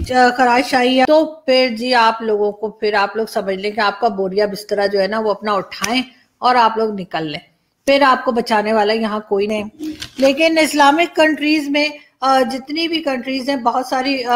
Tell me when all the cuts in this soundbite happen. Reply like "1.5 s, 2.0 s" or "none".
1.1 s, 9.5 s